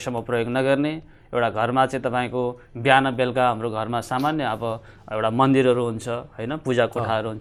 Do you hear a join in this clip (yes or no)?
no